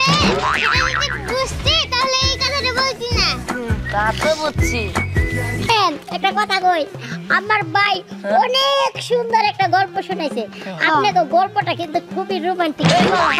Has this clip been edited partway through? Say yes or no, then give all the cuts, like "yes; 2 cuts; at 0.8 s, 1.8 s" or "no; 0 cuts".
yes; 1 cut; at 5.7 s